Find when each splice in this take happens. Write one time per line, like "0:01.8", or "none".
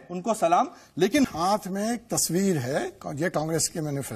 0:01.3